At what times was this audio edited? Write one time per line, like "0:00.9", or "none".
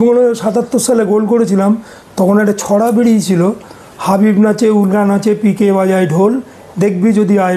none